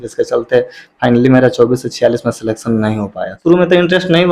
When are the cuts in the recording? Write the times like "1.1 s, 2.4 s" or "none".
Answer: 3.3 s

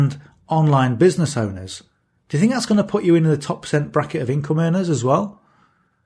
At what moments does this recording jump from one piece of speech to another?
none

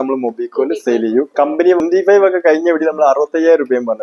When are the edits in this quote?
1.8 s

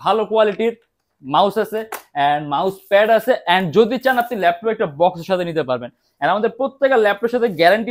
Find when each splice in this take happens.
none

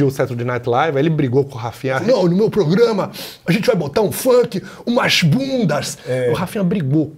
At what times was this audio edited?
2.0 s

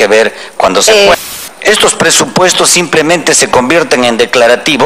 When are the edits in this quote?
1.2 s

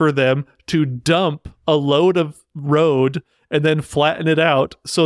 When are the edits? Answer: none

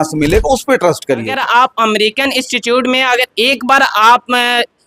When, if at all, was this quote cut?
1.4 s

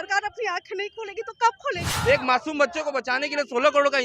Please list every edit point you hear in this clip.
1.9 s

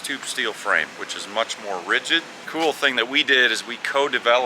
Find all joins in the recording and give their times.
2.4 s

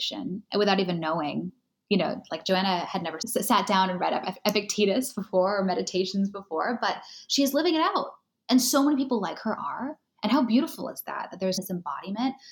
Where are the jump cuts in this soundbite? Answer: 11.6 s

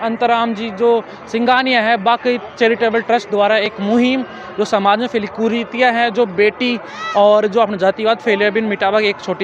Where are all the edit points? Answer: none

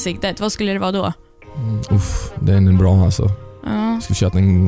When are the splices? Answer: none

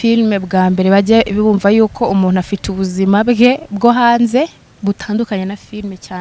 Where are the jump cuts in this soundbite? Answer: none

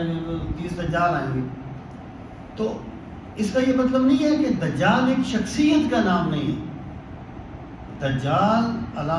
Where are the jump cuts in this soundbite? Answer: none

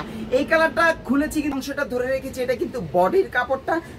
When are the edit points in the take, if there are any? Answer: 1.5 s

